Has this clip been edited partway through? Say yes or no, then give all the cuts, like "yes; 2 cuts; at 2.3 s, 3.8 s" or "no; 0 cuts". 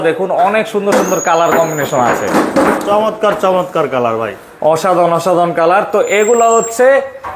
no; 0 cuts